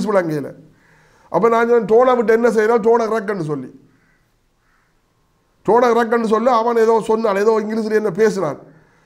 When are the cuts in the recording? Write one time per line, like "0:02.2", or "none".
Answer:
none